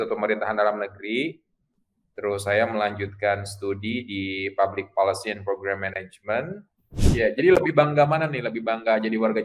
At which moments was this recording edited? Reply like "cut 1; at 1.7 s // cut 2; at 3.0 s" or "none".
cut 1; at 7.0 s